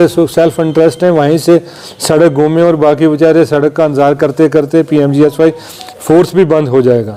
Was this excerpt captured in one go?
yes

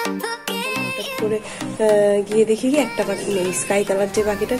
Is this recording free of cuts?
no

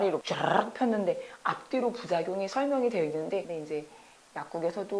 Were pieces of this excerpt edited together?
yes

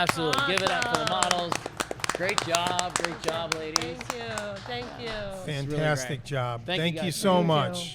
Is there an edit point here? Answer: no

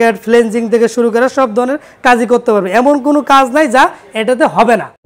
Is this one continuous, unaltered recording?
yes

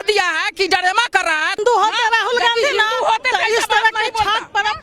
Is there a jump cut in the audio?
yes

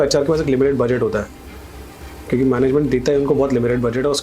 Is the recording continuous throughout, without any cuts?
yes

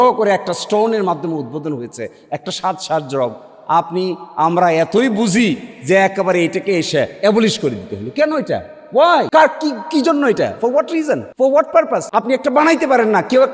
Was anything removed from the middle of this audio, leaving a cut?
yes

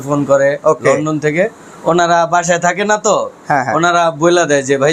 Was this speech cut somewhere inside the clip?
no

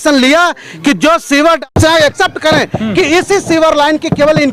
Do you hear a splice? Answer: yes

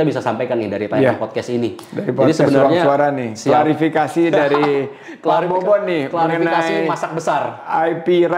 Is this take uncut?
yes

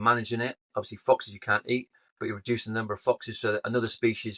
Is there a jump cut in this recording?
no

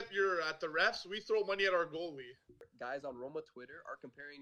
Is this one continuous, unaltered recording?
no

